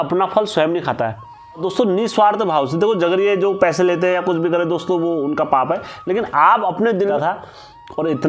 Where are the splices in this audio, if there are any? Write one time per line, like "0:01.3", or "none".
0:01.6
0:07.1

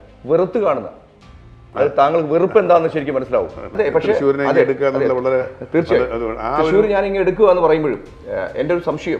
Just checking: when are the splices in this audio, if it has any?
0:03.6

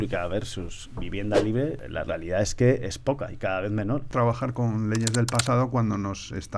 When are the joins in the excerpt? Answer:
0:01.8
0:04.1

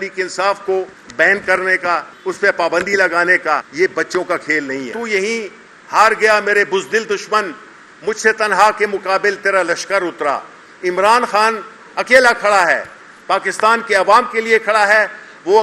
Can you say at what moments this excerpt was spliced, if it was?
0:01.0
0:02.1
0:03.7
0:04.9

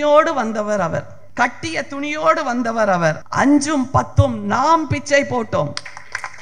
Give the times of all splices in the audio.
0:01.2
0:03.2

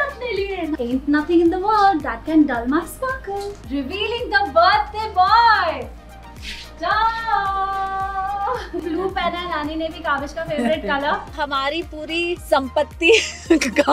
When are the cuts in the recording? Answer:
0:00.8
0:03.5
0:08.8
0:11.2
0:12.4

